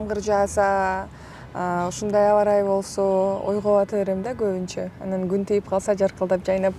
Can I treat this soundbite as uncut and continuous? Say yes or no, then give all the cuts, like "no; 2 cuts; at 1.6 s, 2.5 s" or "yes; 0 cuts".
yes; 0 cuts